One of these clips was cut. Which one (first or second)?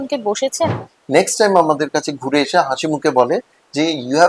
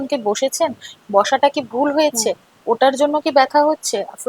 first